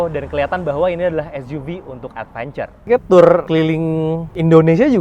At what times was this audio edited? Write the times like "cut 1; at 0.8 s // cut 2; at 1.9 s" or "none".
cut 1; at 2.9 s // cut 2; at 3.9 s